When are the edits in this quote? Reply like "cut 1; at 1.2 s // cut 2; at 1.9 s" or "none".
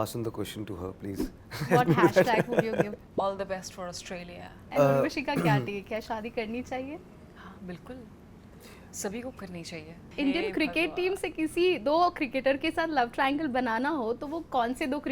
cut 1; at 3.0 s // cut 2; at 4.6 s // cut 3; at 7.2 s // cut 4; at 10.0 s